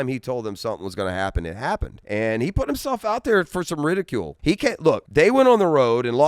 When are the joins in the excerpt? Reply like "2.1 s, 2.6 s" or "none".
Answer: 1.9 s, 4.7 s